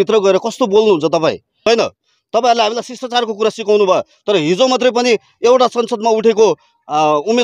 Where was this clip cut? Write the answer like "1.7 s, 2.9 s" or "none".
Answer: 1.7 s